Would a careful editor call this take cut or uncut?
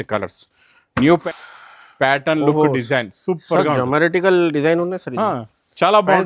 cut